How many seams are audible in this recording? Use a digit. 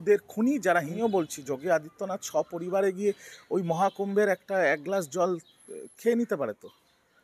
1